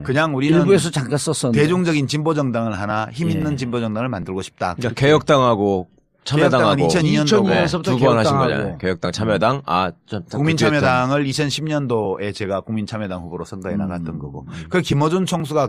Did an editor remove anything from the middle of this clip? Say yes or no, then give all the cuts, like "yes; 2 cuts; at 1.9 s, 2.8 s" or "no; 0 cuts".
yes; 1 cut; at 9.9 s